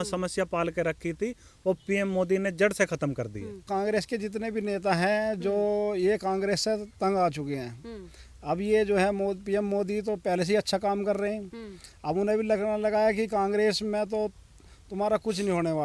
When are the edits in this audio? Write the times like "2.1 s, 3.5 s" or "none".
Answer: 3.6 s